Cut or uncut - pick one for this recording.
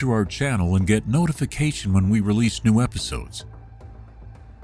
cut